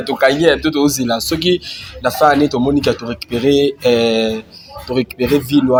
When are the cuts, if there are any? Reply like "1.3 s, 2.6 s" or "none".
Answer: none